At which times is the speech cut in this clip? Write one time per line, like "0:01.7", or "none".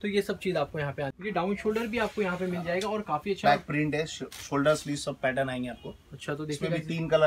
0:01.2